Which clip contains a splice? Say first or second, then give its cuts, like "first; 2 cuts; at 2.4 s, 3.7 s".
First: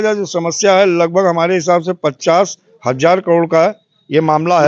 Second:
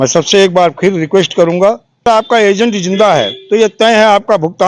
second; 1 cut; at 2.1 s